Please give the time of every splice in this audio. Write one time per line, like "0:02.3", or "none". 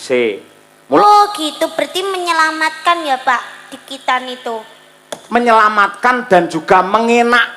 0:01.0